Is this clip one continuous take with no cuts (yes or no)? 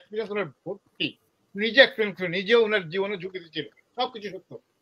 yes